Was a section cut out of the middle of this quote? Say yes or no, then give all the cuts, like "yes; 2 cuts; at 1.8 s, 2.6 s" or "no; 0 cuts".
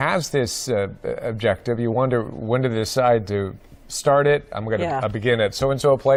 no; 0 cuts